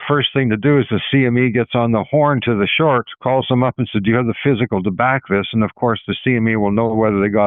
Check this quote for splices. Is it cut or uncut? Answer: uncut